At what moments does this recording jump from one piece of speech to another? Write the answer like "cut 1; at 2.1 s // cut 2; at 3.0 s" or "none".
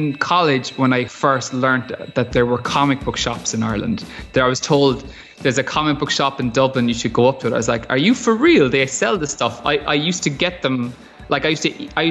cut 1; at 1.1 s // cut 2; at 2.3 s